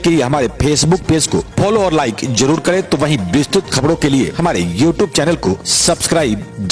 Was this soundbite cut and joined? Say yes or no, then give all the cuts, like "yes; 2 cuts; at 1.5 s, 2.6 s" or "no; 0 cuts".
no; 0 cuts